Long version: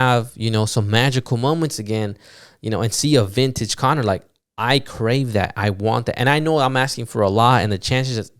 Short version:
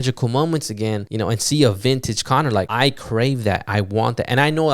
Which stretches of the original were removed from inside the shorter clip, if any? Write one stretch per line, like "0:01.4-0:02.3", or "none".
0:02.1-0:02.6
0:04.2-0:04.6